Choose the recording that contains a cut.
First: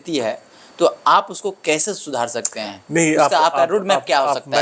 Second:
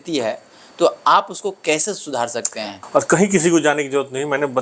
second; 1 cut; at 2.8 s

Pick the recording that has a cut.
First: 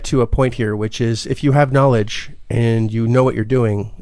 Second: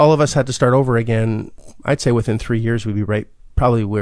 second; 1 cut; at 1.6 s

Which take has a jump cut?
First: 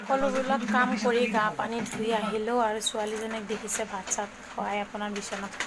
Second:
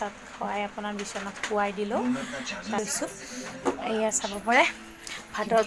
second; 1 cut; at 2.8 s

